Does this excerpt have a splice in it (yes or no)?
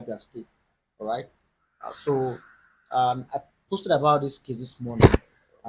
no